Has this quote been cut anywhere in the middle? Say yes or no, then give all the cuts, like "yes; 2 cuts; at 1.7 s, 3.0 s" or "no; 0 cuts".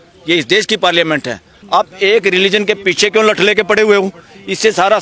yes; 1 cut; at 1.5 s